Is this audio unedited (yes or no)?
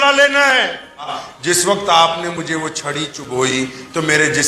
no